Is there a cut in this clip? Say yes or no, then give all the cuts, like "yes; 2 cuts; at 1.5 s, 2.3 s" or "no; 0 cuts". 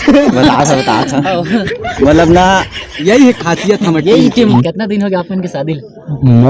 yes; 1 cut; at 4.5 s